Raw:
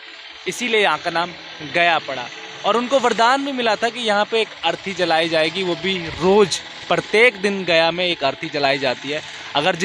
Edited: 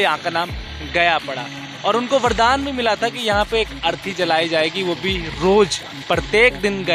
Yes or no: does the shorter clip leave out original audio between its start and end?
no